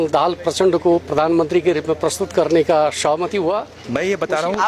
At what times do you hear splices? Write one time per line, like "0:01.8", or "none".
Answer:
0:03.8